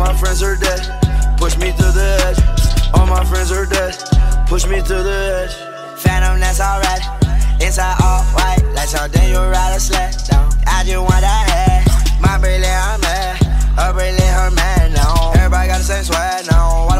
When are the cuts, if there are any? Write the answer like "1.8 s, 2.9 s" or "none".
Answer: none